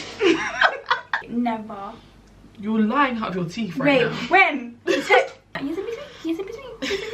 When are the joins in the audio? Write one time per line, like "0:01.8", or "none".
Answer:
0:01.2
0:05.6